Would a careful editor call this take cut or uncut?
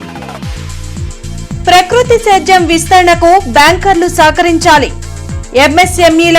uncut